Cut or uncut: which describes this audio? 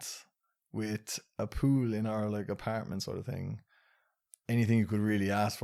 uncut